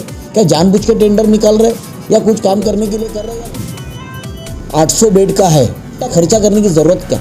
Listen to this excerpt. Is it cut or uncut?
cut